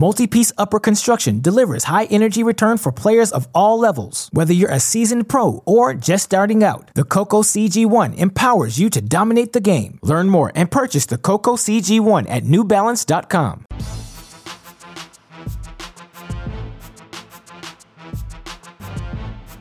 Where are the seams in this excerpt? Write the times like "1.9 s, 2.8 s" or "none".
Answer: 13.7 s, 17.3 s